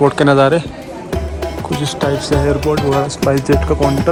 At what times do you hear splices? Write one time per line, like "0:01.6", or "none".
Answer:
none